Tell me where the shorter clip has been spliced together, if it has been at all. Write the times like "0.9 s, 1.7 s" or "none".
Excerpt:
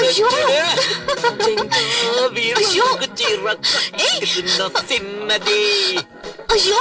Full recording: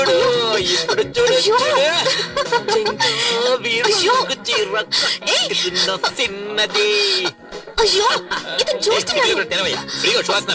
none